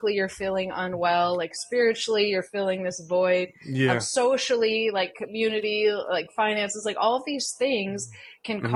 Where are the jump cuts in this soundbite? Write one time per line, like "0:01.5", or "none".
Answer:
none

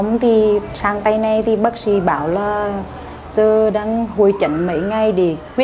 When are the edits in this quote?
none

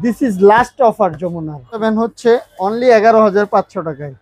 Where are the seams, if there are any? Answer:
0:01.8

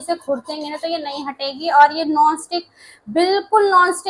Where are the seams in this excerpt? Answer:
none

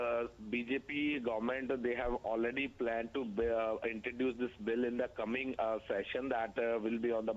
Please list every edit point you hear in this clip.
0:05.0

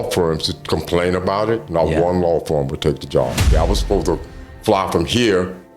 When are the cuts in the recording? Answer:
0:03.5

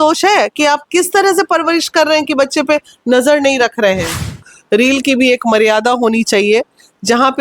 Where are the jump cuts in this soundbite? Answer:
0:04.5

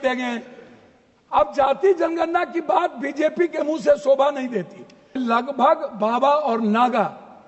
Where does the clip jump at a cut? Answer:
0:05.1

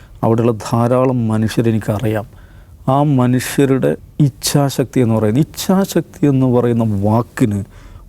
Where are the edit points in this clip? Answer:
0:04.1

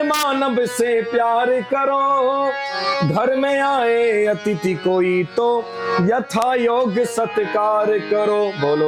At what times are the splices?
none

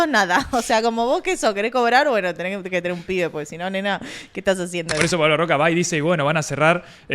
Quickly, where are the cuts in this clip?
0:05.0

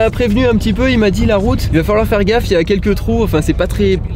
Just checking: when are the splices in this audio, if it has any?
0:01.6

